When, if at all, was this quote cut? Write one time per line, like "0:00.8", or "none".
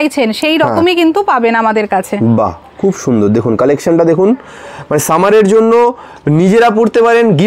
none

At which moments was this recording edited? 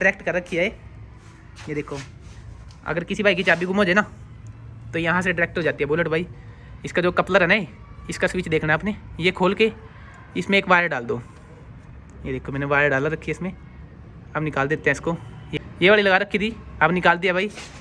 none

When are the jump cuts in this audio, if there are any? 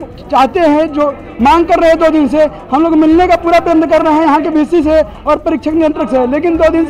none

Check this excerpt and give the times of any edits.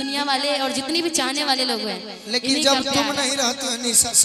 none

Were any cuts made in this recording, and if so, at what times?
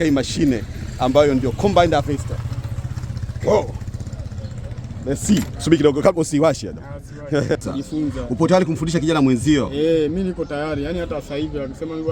0:07.7

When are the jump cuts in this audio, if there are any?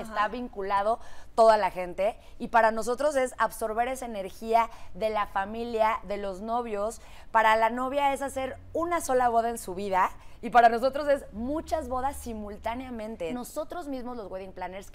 0:13.3

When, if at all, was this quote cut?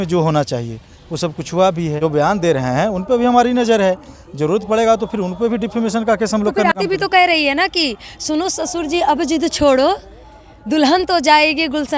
0:02.0
0:06.7

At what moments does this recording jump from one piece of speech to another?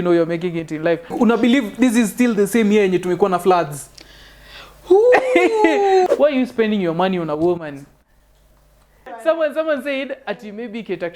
0:01.1
0:06.1
0:09.1

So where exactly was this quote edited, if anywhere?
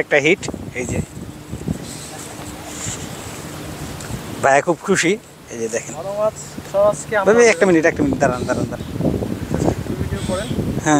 none

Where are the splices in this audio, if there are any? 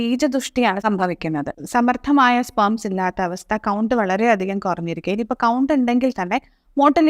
0:01.6

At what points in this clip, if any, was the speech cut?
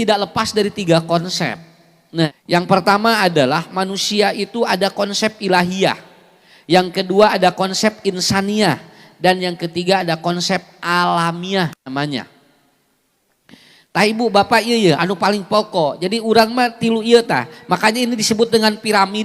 0:02.3

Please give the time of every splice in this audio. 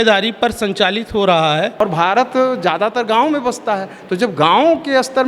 0:01.8

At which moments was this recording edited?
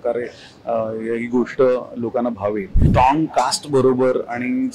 0:02.8

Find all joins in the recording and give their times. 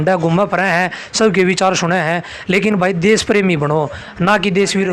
none

